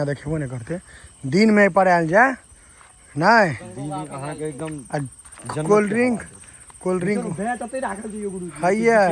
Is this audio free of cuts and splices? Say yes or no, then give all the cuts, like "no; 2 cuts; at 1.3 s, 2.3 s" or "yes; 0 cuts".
yes; 0 cuts